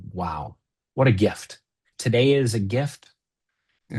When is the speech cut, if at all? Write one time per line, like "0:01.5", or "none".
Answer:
0:01.9